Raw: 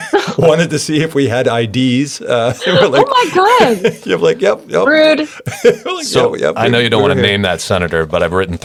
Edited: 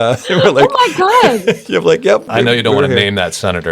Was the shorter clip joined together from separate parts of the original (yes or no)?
yes